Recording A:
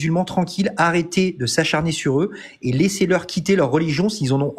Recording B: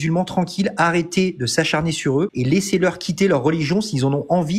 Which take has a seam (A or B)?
B